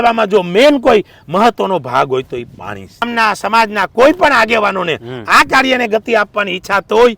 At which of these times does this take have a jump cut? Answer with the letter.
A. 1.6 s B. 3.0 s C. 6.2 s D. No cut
B